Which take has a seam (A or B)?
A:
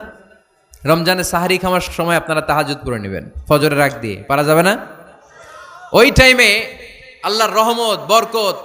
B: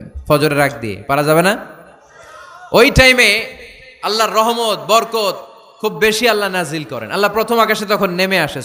A